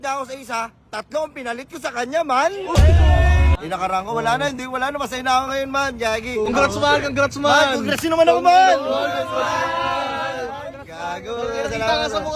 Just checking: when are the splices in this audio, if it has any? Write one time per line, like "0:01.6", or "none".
0:03.5
0:06.5